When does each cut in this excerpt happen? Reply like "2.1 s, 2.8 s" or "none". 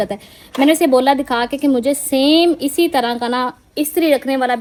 none